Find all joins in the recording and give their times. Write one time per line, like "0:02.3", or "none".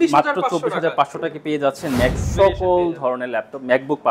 0:02.2